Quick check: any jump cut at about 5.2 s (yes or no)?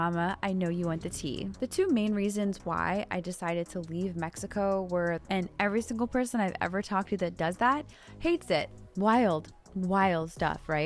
yes